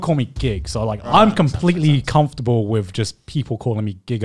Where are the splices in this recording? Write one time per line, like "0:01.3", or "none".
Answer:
0:01.0